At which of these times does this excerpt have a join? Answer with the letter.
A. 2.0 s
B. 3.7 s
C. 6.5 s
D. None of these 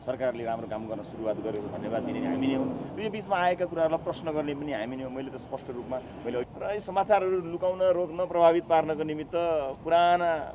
C